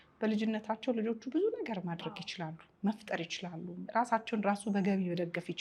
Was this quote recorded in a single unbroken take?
yes; 0 cuts

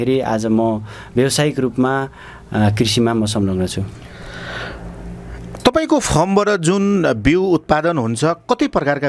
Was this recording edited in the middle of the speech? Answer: no; 0 cuts

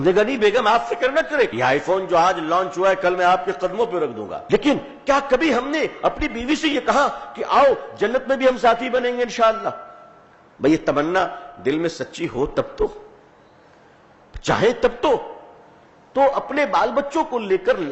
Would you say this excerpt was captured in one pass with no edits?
no; 2 cuts; at 1.5 s, 4.3 s

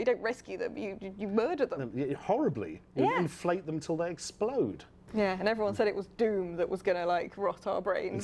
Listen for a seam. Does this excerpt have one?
yes; 1 cut; at 5.2 s

